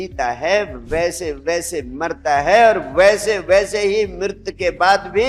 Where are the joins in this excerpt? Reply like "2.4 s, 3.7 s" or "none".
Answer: none